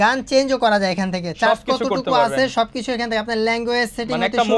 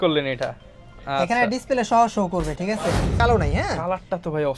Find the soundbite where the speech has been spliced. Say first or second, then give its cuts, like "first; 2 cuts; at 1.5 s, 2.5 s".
second; 1 cut; at 3.1 s